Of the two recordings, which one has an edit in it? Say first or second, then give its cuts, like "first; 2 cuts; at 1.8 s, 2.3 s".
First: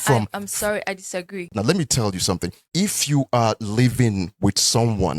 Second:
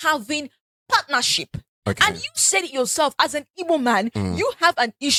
first; 2 cuts; at 1.4 s, 2.6 s